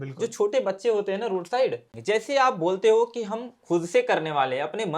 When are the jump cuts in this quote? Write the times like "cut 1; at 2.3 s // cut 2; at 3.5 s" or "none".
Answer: cut 1; at 1.9 s